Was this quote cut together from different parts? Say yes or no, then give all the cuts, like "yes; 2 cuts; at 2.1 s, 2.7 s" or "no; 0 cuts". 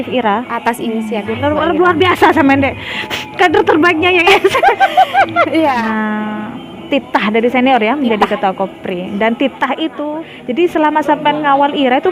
yes; 2 cuts; at 5.8 s, 10.3 s